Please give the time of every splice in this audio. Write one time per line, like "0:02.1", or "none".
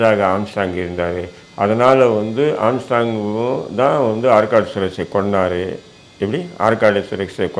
none